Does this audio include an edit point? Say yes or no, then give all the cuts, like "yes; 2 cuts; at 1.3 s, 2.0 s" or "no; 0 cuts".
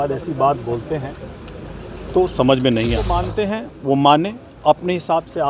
yes; 1 cut; at 3.3 s